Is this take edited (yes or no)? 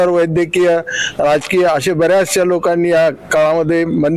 no